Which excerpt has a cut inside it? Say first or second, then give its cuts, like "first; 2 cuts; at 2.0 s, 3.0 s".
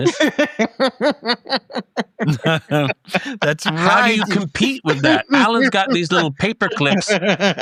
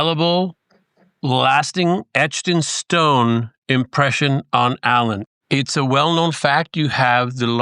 second; 1 cut; at 5.2 s